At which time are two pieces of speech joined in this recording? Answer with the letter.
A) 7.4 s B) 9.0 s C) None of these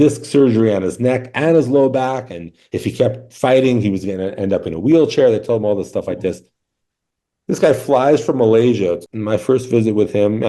B